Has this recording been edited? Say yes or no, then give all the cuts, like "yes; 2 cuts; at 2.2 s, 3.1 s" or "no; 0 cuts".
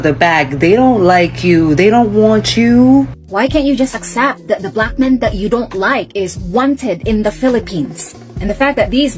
yes; 1 cut; at 3.2 s